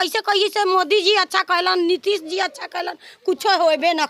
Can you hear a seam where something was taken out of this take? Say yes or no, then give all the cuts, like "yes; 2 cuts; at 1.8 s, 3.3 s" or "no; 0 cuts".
no; 0 cuts